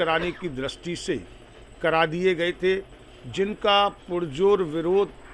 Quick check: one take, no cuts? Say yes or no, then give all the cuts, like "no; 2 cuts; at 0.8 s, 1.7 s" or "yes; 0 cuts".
yes; 0 cuts